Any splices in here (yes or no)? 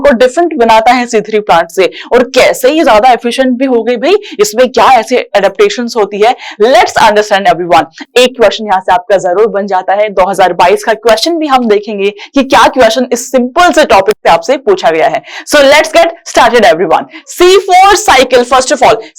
no